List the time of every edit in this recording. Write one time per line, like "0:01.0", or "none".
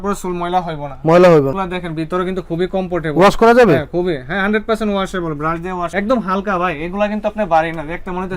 0:05.9